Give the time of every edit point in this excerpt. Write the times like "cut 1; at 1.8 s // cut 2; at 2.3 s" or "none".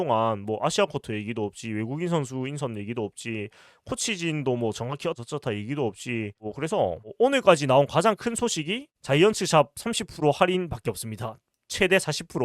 none

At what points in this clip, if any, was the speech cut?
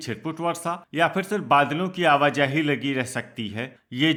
none

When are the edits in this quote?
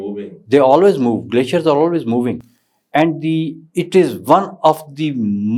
none

